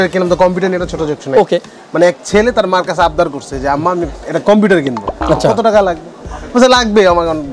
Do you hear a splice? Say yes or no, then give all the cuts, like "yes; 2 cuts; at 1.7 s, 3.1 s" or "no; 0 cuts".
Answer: no; 0 cuts